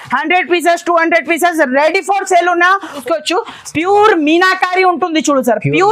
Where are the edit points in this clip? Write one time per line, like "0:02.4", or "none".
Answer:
0:03.0